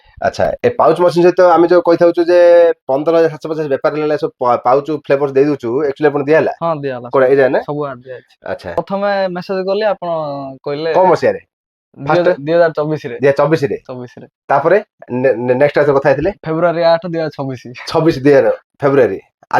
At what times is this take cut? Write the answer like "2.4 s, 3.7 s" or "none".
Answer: 8.8 s